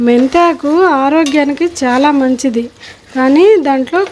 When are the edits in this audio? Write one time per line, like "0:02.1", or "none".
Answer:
none